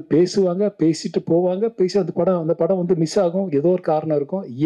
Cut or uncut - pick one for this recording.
uncut